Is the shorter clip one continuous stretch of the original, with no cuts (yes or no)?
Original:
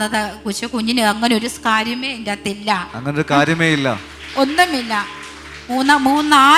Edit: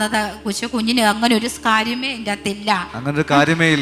yes